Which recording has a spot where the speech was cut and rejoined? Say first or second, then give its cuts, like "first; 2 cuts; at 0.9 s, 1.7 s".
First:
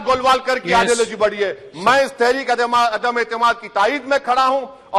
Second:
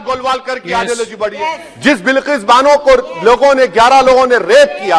second; 1 cut; at 1.4 s